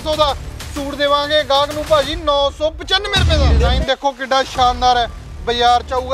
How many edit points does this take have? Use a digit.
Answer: 1